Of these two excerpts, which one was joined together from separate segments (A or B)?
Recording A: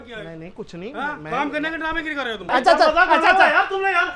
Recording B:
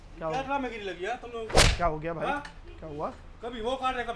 A